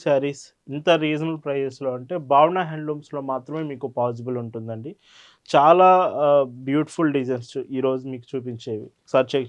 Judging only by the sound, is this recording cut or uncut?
uncut